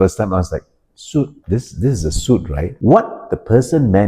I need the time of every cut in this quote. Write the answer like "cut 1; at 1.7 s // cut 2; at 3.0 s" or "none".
cut 1; at 1.4 s // cut 2; at 2.6 s